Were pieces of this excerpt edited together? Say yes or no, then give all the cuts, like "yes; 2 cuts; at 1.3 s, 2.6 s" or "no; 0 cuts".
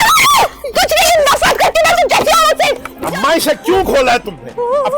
yes; 1 cut; at 2.9 s